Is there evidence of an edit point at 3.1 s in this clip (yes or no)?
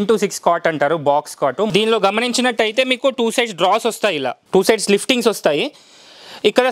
no